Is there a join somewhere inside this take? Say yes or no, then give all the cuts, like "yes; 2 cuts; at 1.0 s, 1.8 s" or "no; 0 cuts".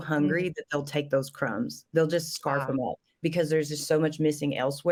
no; 0 cuts